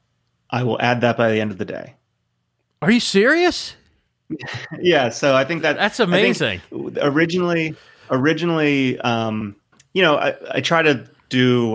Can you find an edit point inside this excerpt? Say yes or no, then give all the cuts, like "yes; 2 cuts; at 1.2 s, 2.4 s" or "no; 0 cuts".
no; 0 cuts